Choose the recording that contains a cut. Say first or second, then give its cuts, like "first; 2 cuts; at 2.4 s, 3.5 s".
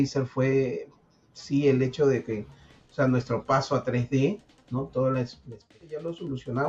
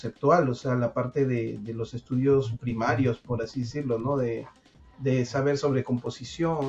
first; 1 cut; at 5.8 s